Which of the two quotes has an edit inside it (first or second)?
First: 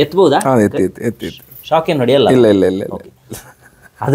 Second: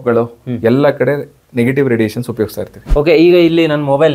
second